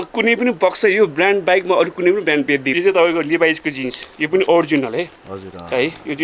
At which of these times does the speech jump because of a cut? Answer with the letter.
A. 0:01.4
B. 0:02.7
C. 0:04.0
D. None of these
B